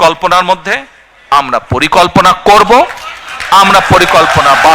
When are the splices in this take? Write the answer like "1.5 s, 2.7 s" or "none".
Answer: none